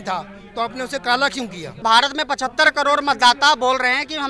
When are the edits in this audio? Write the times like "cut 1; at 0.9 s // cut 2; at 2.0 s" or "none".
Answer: cut 1; at 1.8 s

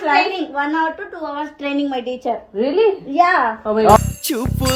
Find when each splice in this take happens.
none

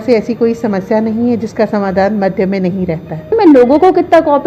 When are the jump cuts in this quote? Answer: cut 1; at 3.3 s

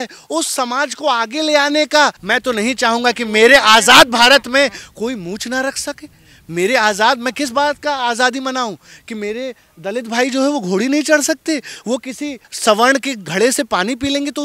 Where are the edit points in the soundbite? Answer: cut 1; at 2.2 s

